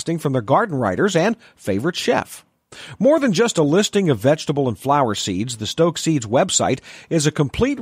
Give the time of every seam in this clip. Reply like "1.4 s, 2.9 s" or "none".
none